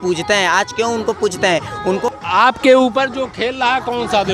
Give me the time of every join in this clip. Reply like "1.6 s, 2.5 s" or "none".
2.1 s

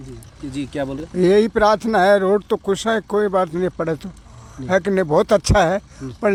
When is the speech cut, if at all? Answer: none

